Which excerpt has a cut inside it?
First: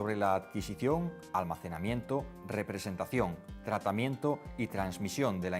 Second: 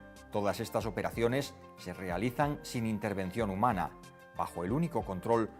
first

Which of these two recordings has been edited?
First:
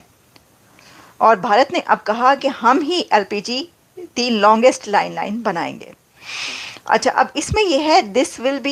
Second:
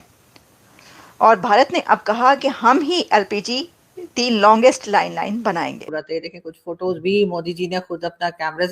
second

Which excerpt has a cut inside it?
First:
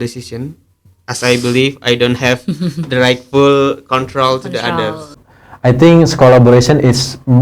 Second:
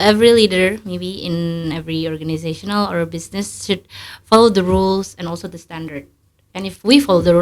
first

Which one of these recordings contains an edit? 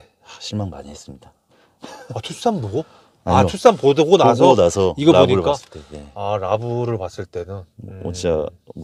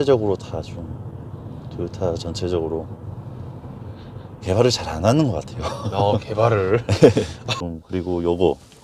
second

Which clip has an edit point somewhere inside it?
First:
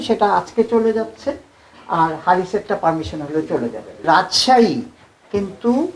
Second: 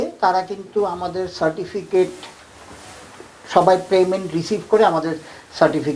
first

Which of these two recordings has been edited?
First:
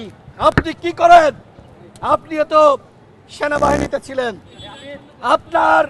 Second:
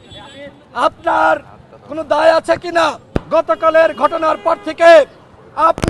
second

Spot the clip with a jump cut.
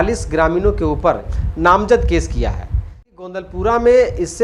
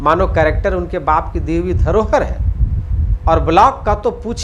first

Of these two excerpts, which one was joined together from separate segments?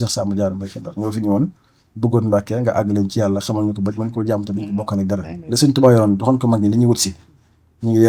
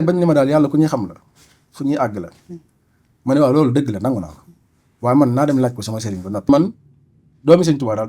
second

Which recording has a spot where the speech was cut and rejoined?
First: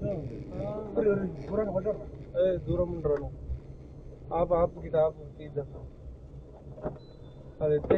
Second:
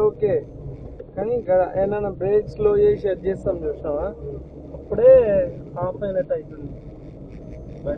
first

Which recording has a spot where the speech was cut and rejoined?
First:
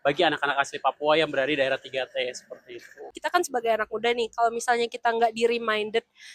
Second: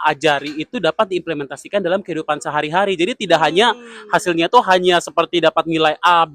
first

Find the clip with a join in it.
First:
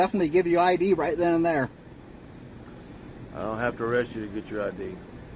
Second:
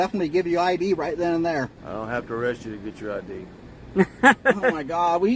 second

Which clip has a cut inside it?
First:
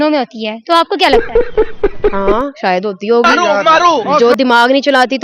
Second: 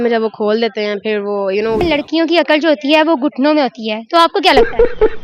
second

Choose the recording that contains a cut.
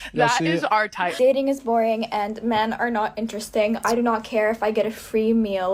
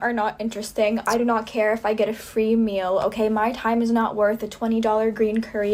first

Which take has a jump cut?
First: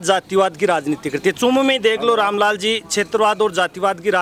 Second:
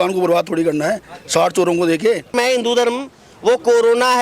second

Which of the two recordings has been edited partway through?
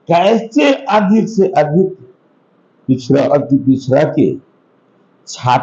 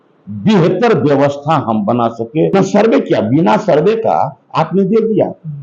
second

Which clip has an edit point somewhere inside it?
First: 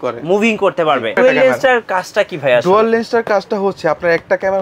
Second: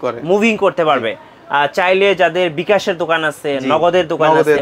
first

